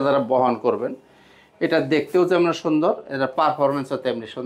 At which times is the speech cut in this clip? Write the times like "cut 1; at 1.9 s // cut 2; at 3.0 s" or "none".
none